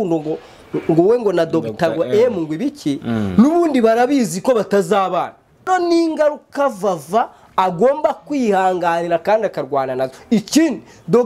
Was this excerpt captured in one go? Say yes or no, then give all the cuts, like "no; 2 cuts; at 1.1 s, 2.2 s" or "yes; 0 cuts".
no; 1 cut; at 5.7 s